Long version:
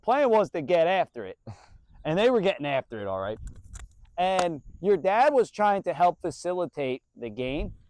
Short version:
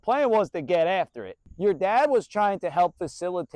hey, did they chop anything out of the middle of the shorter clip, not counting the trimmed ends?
yes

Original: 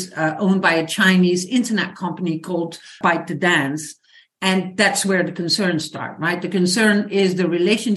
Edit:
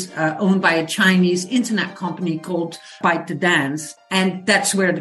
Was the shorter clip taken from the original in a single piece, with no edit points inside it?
no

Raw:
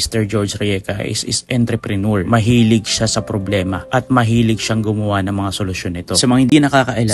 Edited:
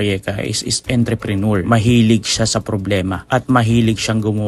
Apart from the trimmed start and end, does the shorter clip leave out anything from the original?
no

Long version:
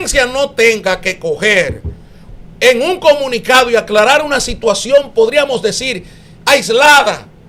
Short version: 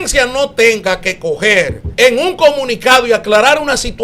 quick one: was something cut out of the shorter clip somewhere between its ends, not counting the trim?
yes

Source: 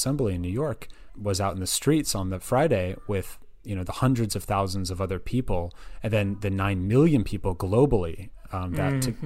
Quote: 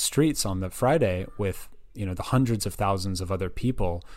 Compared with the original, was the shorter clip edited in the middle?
no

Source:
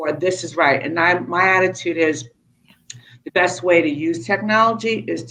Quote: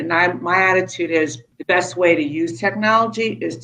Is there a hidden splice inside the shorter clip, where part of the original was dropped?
yes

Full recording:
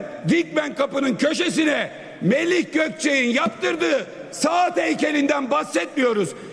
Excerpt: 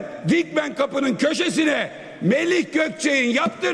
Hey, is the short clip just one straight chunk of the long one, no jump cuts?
yes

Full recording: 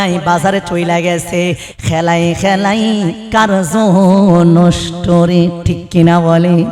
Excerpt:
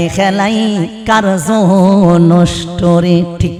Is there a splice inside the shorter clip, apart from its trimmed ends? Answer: no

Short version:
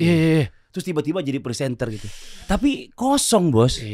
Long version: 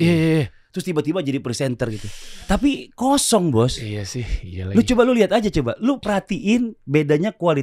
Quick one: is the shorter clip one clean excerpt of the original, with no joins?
yes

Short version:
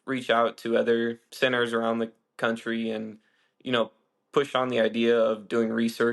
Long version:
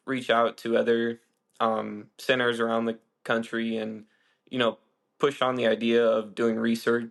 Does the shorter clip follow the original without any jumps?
no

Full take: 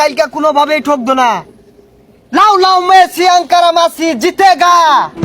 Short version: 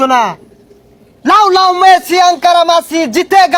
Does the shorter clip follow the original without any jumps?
yes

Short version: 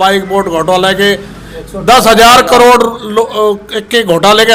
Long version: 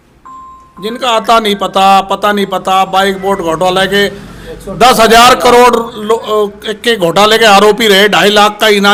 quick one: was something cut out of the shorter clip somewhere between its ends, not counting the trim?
no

